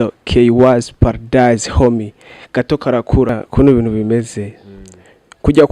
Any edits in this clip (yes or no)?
yes